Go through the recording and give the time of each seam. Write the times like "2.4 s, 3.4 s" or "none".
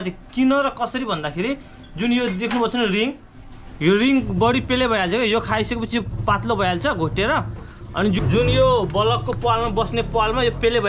8.2 s